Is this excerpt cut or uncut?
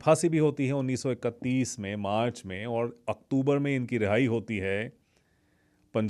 uncut